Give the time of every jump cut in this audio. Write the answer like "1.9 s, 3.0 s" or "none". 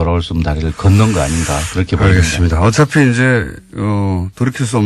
2.8 s